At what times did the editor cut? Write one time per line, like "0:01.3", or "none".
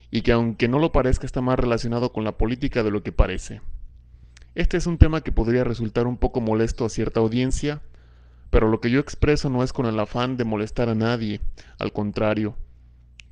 0:12.1